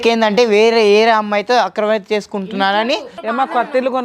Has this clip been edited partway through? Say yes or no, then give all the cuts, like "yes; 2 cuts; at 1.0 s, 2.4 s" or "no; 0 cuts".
yes; 1 cut; at 3.1 s